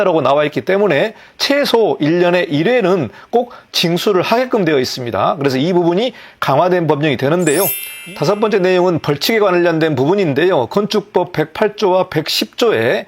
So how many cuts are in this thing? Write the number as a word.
one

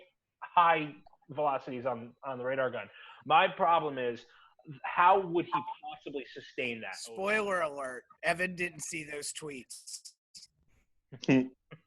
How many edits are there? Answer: one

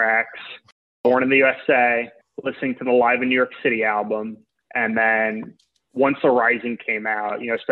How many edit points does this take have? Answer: two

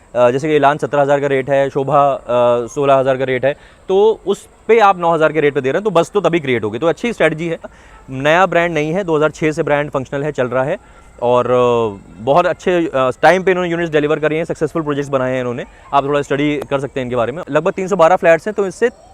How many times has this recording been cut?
two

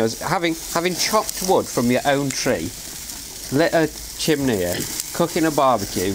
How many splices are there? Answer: zero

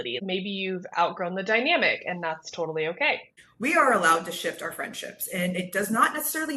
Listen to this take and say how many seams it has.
zero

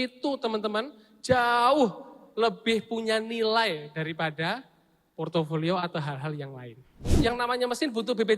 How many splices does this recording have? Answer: one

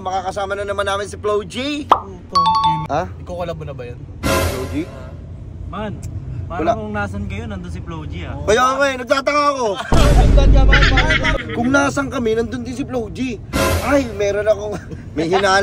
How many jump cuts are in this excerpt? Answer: two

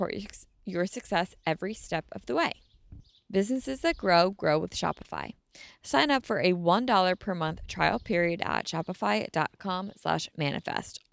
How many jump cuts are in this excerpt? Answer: zero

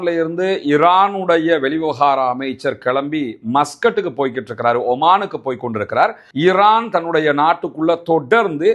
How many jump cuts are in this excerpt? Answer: one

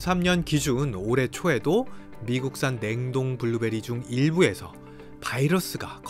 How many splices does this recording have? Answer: zero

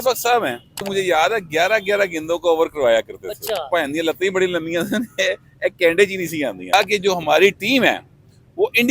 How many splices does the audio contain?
three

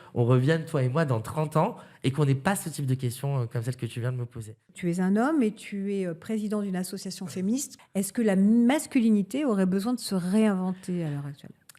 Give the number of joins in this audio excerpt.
two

